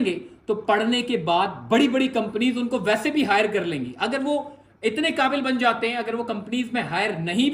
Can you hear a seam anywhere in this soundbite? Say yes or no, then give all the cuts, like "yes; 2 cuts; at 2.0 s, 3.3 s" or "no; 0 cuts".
no; 0 cuts